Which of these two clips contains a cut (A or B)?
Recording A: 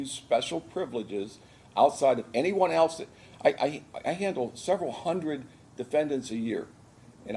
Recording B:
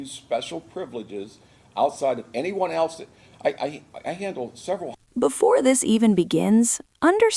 A